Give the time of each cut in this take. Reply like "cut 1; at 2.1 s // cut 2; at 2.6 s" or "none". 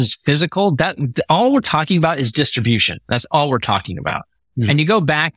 none